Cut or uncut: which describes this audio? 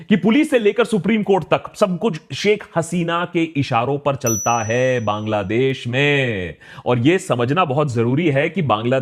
uncut